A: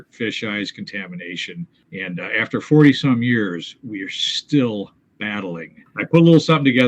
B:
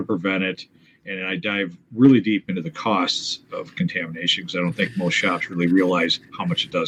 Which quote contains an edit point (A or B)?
A